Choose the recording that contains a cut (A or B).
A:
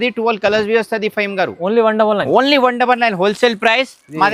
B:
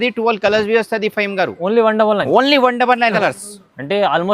B